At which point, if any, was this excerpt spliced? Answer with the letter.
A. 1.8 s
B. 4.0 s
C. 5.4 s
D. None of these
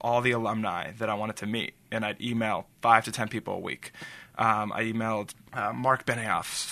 C